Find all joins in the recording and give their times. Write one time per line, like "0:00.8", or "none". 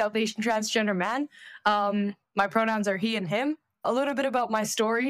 none

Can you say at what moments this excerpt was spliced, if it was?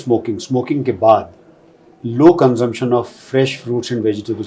none

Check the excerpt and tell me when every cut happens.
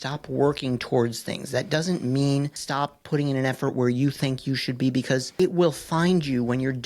0:02.6
0:05.3

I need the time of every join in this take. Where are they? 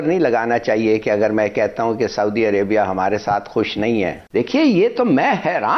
0:04.2

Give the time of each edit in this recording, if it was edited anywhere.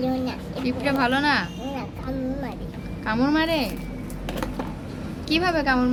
none

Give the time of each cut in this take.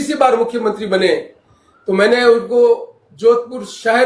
none

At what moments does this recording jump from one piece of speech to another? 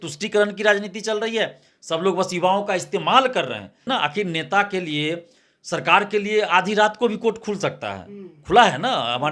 0:03.8

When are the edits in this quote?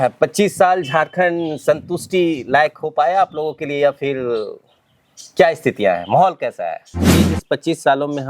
0:07.0

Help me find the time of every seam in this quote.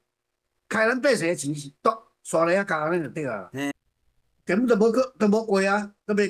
0:03.7

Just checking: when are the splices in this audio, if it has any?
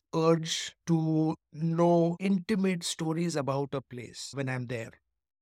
none

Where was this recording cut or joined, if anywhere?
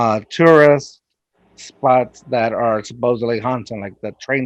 none

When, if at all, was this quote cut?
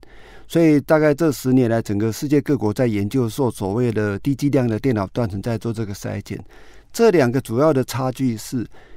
none

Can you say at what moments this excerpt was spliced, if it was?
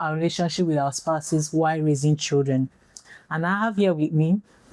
none

